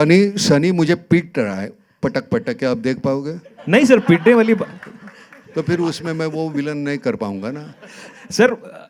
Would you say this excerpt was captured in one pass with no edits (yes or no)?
yes